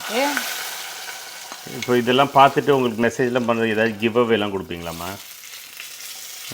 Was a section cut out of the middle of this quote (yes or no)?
no